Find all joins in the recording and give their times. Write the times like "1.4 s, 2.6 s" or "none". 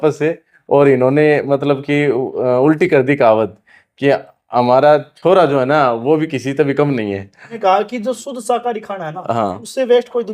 7.4 s